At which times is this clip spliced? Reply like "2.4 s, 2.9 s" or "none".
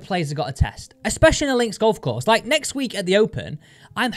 none